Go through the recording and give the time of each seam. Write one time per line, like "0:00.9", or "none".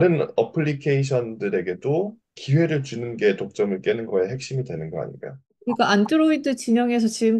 0:05.5